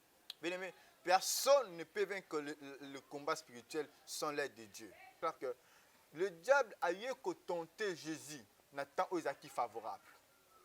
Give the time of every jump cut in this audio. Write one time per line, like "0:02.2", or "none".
0:05.2

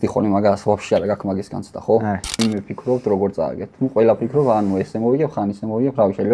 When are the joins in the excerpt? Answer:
0:02.4

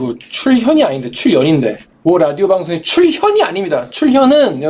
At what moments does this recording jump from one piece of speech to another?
0:01.9

